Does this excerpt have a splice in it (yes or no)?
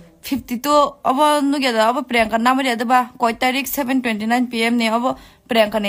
no